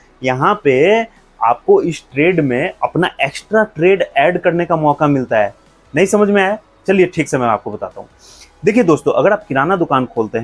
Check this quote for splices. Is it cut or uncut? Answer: uncut